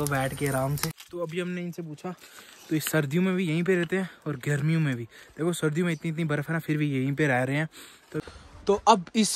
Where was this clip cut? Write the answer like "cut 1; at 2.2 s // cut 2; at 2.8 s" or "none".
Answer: cut 1; at 1.0 s // cut 2; at 8.2 s